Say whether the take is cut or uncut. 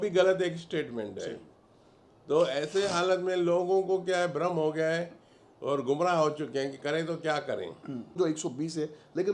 cut